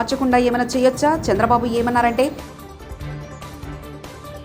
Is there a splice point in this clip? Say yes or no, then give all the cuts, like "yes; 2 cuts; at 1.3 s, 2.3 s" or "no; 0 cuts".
no; 0 cuts